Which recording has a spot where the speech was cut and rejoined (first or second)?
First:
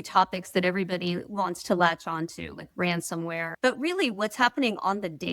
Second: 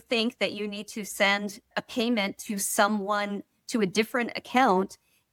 first